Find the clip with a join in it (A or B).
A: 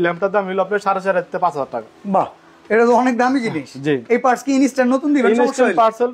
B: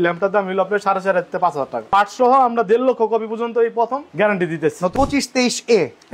B